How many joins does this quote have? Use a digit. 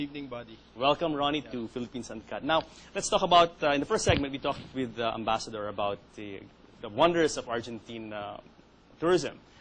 1